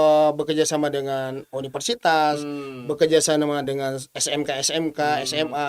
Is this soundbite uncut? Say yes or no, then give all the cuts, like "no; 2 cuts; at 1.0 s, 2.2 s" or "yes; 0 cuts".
yes; 0 cuts